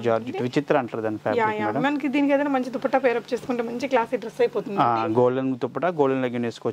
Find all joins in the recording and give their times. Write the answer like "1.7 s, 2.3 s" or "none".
none